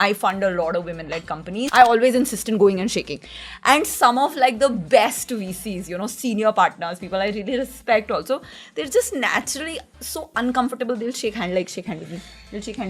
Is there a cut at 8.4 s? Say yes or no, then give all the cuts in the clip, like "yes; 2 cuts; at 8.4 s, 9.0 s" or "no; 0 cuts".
no; 1 cut; at 1.7 s